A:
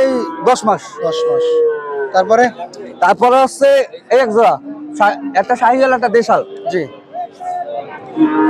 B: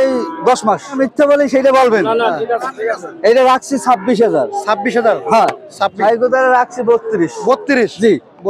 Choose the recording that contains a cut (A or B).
B